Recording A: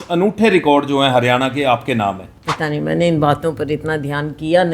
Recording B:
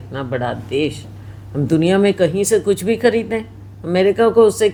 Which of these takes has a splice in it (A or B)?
A